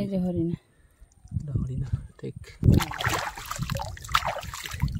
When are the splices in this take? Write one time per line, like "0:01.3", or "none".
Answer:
0:02.6